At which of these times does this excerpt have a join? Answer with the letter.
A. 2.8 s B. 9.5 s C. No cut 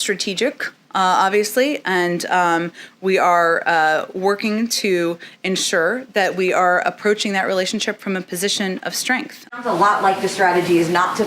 B